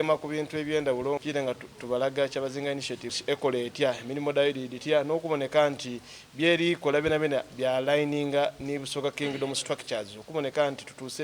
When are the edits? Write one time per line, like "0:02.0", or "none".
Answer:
0:01.2
0:03.1